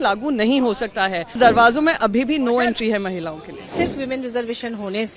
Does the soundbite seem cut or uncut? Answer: cut